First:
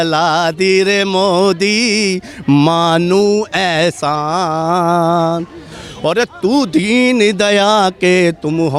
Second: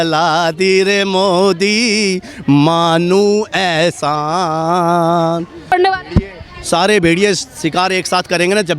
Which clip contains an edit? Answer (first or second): second